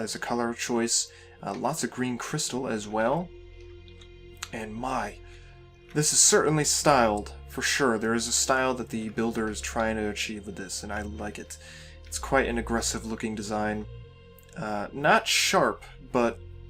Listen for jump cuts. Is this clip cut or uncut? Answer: uncut